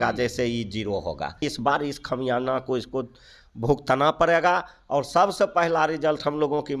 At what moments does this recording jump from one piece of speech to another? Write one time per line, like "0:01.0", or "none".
0:01.4